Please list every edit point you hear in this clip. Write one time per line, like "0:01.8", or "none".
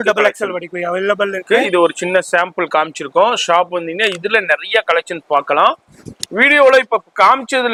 none